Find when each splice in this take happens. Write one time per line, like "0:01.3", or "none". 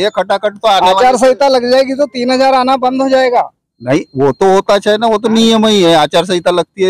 none